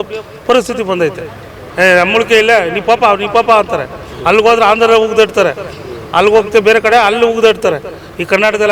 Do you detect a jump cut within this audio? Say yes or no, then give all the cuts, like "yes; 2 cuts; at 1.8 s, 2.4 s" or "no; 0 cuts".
yes; 1 cut; at 1.6 s